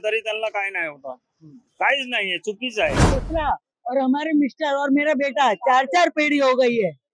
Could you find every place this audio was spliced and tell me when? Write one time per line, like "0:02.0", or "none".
0:03.2